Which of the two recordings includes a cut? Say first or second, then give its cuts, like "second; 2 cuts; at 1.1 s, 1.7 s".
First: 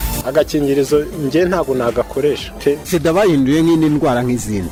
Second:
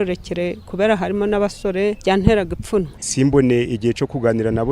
second; 2 cuts; at 2.0 s, 3.0 s